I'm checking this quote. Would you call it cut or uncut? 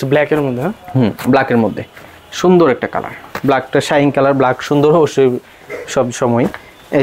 uncut